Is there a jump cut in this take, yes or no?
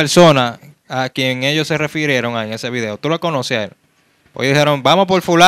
no